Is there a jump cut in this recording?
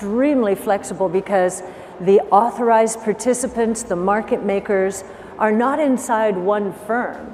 no; 0 cuts

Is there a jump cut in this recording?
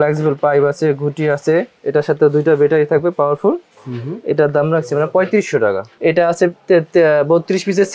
yes; 1 cut; at 5.9 s

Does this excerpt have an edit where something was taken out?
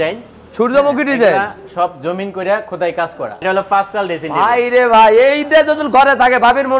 yes; 1 cut; at 3.3 s

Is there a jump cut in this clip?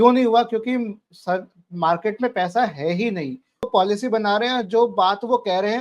yes; 1 cut; at 3.7 s

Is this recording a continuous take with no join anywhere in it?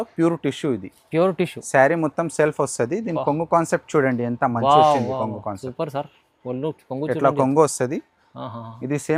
yes; 0 cuts

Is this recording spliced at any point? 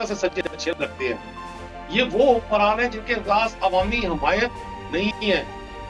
no; 0 cuts

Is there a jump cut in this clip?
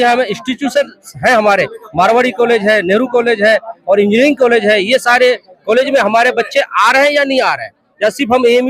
no; 0 cuts

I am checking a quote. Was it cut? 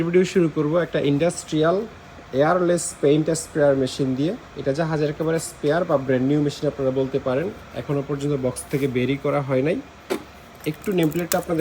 no; 0 cuts

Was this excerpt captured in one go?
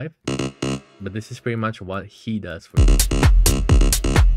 no; 1 cut; at 2.8 s

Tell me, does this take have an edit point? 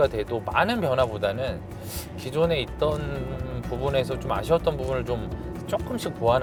no; 0 cuts

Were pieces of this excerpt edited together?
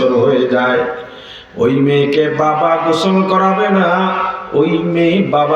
no; 0 cuts

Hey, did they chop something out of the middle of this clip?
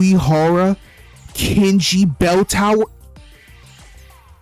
no; 0 cuts

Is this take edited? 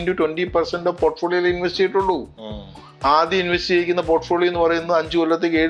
no; 0 cuts

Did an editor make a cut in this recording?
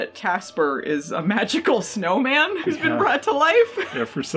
no; 0 cuts

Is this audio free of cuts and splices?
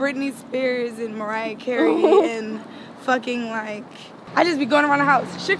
no; 1 cut; at 4.2 s

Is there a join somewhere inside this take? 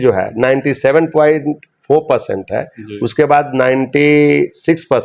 no; 0 cuts

